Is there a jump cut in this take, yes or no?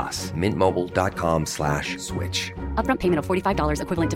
no